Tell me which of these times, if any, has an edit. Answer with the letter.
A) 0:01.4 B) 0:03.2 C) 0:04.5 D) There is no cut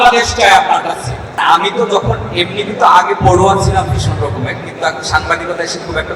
A